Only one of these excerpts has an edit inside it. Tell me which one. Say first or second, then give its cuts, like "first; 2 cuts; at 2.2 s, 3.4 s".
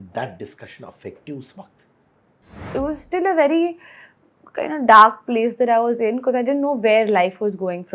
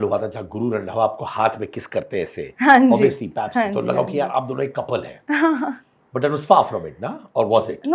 first; 1 cut; at 2.7 s